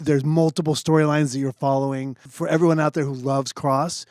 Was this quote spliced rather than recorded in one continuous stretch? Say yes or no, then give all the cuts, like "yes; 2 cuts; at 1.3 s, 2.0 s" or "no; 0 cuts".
yes; 1 cut; at 2.3 s